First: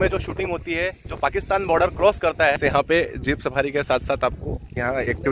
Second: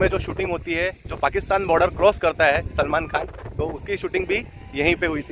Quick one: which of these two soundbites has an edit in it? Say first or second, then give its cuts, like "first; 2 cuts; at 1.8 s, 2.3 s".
first; 1 cut; at 2.6 s